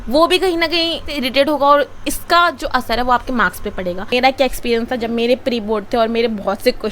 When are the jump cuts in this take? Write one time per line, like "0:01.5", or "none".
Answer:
0:04.1